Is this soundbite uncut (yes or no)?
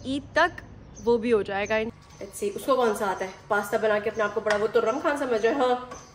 no